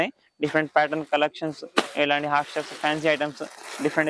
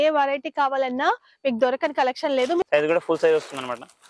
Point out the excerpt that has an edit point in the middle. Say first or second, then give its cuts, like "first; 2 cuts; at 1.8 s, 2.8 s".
second; 1 cut; at 2.6 s